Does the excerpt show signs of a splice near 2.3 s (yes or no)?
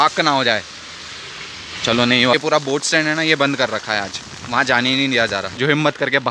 yes